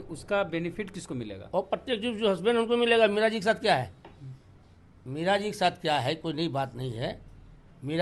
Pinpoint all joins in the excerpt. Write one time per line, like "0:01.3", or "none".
none